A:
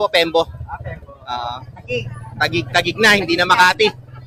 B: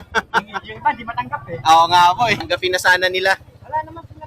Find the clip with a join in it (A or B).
B